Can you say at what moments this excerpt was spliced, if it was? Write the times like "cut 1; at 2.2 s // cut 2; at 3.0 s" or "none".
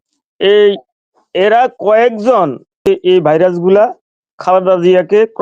cut 1; at 2.9 s